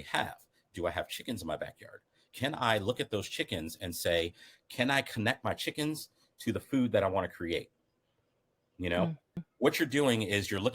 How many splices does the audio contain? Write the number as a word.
one